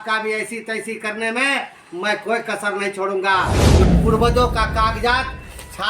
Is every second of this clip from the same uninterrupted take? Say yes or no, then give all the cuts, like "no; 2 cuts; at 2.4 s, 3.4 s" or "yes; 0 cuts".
no; 1 cut; at 3.8 s